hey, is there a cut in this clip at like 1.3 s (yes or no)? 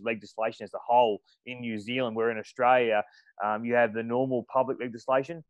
no